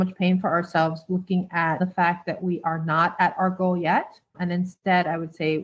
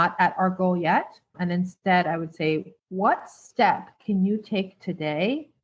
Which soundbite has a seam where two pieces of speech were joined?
first; 1 cut; at 1.8 s

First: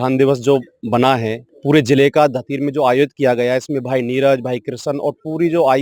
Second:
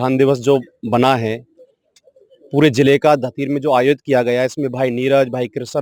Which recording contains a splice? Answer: first; 1 cut; at 1.4 s

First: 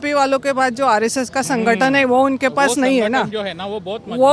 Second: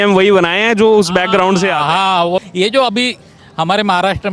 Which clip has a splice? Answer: second; 1 cut; at 2.4 s

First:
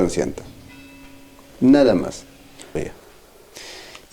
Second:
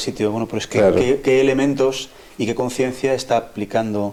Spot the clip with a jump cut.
first; 1 cut; at 2.8 s

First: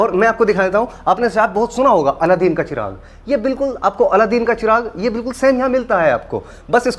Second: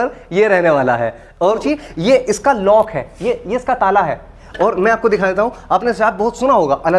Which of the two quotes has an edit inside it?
second; 1 cut; at 1.6 s

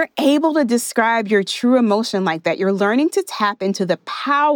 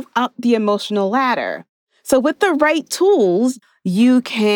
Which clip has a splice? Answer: second; 1 cut; at 3.5 s

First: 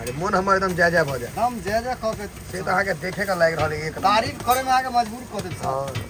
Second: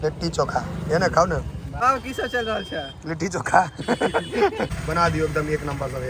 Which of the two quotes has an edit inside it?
second; 2 cuts; at 1.6 s, 4.7 s

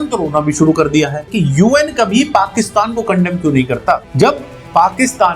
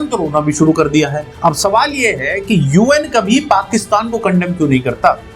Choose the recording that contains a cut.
first; 2 cuts; at 1.2 s, 4.1 s

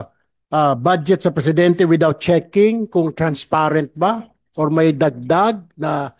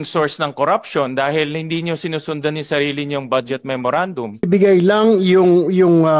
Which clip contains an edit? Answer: second; 1 cut; at 4.5 s

